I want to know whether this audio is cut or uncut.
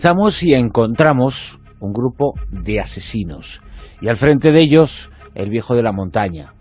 uncut